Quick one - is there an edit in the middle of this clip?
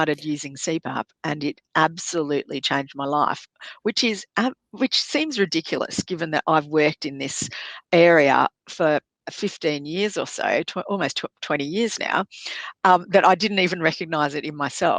no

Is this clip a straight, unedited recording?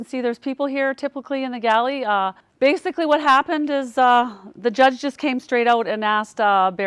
no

